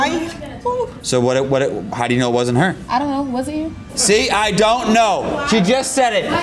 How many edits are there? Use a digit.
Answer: 2